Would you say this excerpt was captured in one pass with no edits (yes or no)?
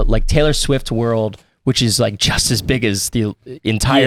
yes